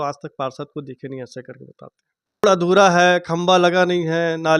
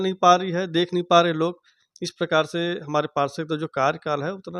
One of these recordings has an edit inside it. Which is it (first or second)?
first